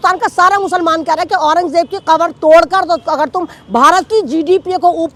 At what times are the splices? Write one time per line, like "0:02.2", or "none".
none